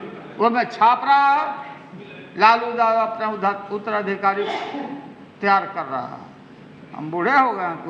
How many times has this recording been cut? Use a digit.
0